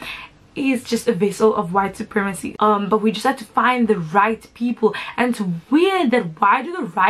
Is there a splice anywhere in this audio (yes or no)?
yes